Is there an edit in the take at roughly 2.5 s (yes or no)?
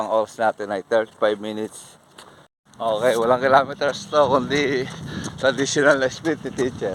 yes